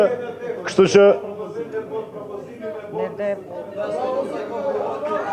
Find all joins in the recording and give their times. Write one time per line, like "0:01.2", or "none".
none